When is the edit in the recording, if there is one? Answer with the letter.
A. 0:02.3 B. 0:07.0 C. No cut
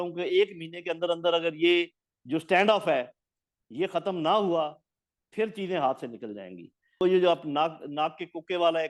B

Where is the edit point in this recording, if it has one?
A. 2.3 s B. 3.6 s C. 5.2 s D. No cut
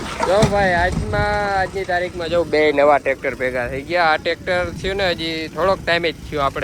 D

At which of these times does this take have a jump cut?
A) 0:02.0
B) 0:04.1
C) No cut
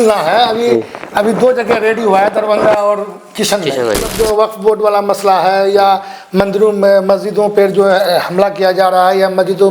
B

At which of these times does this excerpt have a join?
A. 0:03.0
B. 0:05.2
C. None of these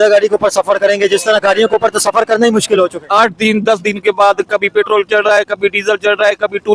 A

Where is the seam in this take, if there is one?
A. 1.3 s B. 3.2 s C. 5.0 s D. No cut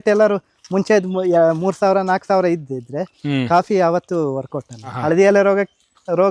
C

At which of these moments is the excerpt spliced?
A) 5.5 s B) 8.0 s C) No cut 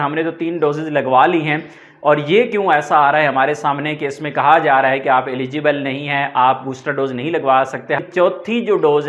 B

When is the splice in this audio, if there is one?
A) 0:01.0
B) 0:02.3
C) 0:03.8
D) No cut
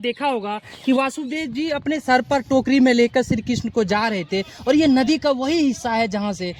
D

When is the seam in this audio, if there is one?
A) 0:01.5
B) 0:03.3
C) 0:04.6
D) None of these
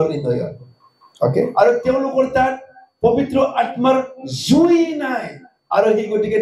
A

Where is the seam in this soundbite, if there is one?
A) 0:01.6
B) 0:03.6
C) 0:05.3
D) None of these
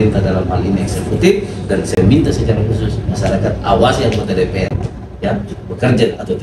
D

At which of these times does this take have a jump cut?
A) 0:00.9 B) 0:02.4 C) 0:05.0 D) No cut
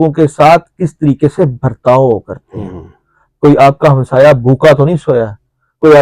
D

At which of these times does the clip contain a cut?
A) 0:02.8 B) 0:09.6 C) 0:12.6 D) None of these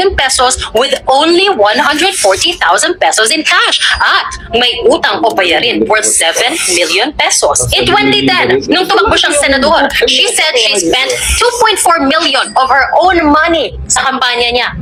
D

